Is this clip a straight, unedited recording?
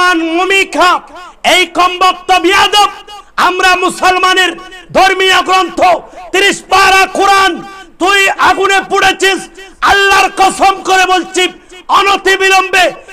yes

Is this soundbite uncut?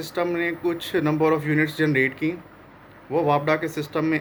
yes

